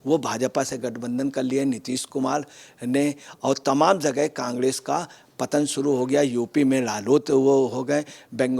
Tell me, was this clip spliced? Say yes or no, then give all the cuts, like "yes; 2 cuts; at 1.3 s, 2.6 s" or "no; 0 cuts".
no; 0 cuts